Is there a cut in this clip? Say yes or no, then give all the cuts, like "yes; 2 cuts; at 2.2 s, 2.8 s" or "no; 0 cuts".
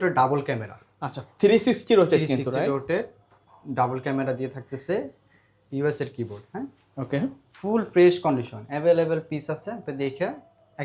no; 0 cuts